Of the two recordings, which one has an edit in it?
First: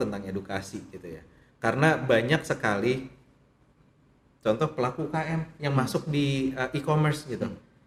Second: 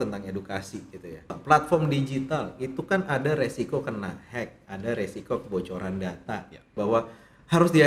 second; 2 cuts; at 1.3 s, 6.7 s

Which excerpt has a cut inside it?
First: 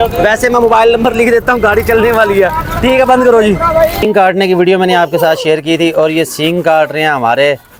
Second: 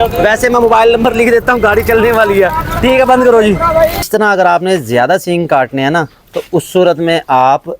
second; 1 cut; at 4.0 s

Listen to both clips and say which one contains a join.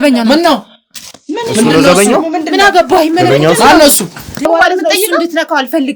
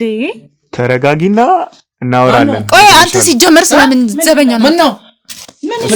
first; 1 cut; at 4.5 s

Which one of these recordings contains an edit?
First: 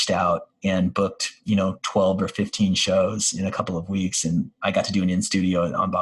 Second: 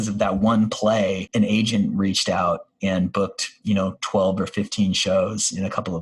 second; 1 cut; at 1.2 s

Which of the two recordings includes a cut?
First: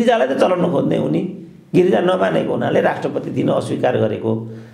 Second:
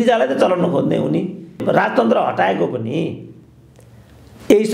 second; 1 cut; at 1.6 s

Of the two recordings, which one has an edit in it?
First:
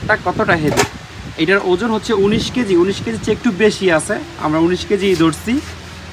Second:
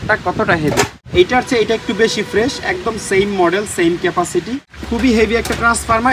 second; 2 cuts; at 1.0 s, 4.7 s

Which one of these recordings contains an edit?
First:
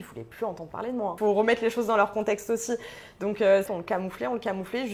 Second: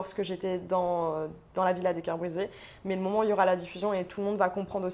first; 2 cuts; at 1.1 s, 3.7 s

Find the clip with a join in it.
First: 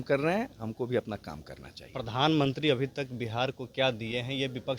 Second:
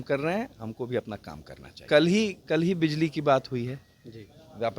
second; 1 cut; at 1.7 s

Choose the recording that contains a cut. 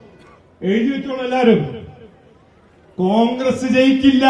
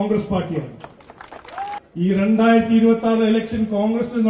second; 1 cut; at 1.8 s

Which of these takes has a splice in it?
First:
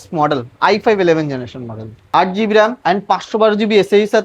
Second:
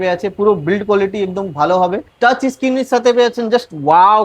second; 1 cut; at 2.1 s

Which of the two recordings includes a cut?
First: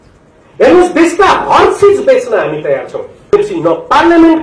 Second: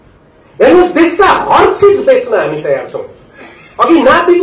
first; 1 cut; at 3.3 s

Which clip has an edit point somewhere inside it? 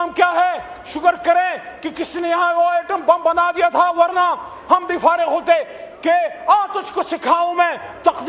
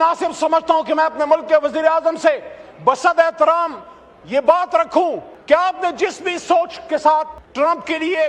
second; 2 cuts; at 5.3 s, 7.4 s

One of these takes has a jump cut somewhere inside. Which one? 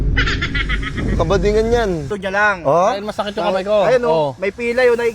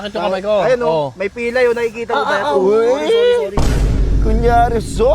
first; 1 cut; at 2.1 s

